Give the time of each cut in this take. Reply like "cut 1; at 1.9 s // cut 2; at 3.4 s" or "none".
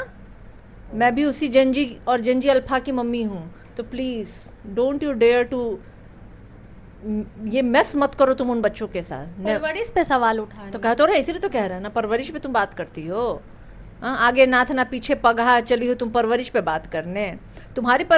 none